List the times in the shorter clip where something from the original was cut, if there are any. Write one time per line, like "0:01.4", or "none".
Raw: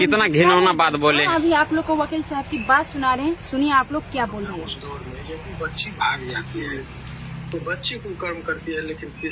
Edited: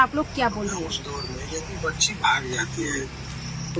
none